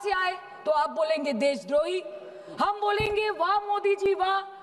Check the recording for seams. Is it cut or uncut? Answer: uncut